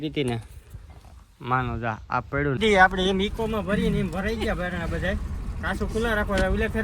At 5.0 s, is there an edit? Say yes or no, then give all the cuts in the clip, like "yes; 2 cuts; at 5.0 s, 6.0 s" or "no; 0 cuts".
no; 1 cut; at 2.6 s